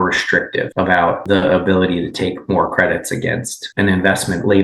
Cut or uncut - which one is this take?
cut